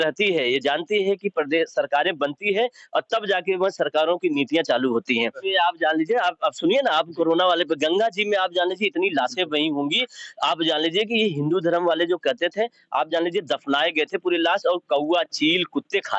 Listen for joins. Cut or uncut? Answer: cut